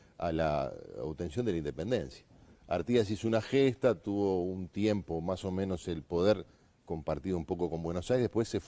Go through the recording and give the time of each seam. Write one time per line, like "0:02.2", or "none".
0:01.6